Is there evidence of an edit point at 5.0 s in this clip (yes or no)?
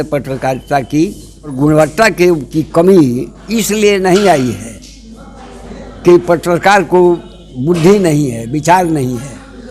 no